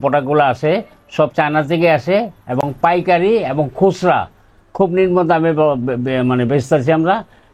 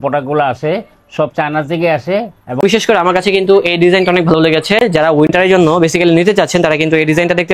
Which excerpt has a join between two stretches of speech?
second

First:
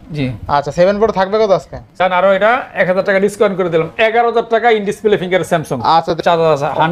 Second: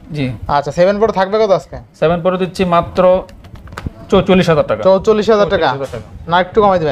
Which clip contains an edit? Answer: first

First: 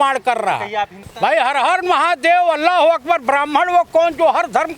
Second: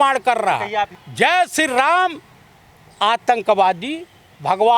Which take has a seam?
first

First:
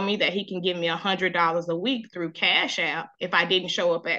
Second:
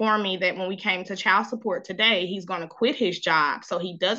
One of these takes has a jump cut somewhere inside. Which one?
first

